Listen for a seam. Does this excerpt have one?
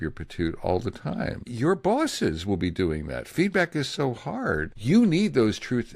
yes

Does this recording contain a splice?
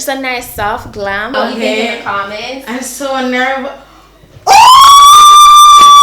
yes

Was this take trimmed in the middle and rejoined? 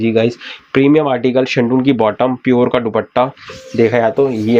no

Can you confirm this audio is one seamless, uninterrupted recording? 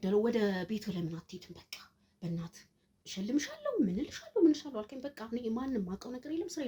yes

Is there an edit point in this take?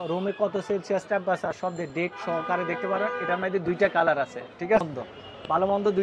yes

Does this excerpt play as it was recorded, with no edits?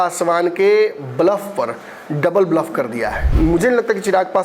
no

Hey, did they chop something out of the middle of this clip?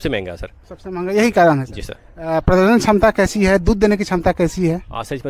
no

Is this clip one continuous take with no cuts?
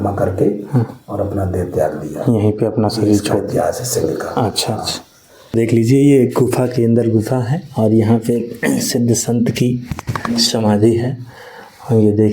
no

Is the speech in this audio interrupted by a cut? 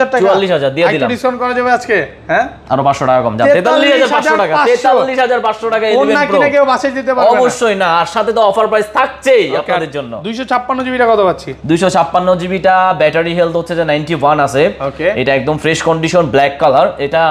no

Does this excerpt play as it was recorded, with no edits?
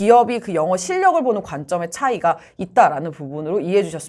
yes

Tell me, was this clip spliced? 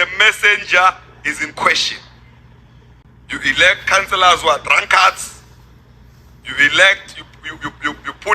yes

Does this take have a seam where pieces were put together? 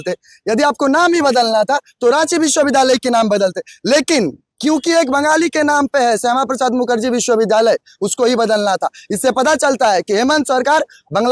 no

